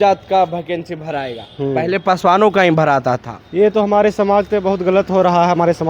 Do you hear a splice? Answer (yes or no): no